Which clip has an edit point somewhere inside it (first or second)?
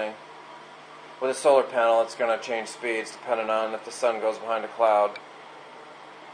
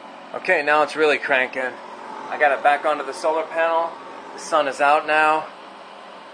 first